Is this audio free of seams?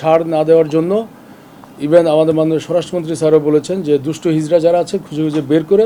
yes; 0 cuts

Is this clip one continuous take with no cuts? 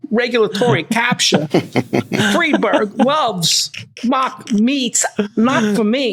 yes; 0 cuts

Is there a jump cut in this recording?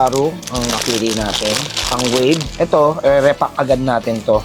yes; 1 cut; at 2.5 s

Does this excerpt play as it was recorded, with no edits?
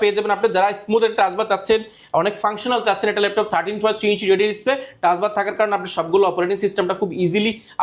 yes; 0 cuts

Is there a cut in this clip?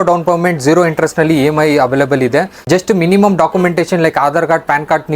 yes; 1 cut; at 2.6 s

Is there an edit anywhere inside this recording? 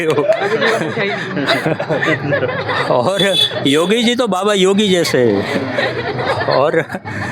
no; 0 cuts

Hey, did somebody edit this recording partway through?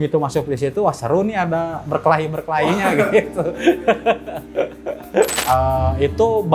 yes; 1 cut; at 5.4 s

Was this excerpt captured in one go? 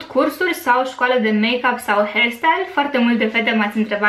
yes; 0 cuts

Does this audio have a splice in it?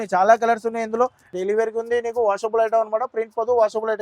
yes; 1 cut; at 1.3 s

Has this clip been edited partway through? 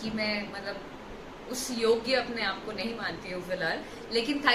no; 0 cuts

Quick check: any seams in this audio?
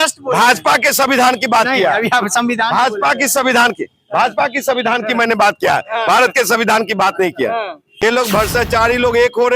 yes; 1 cut; at 8.0 s

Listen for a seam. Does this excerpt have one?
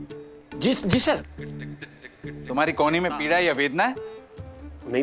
no; 0 cuts

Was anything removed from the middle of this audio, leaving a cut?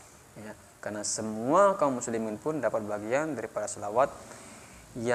no; 0 cuts

